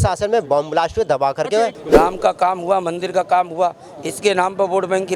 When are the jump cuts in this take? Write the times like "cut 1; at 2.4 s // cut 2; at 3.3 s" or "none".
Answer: cut 1; at 1.8 s